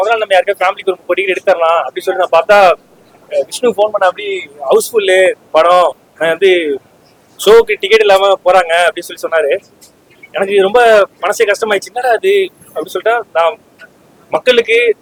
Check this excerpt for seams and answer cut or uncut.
uncut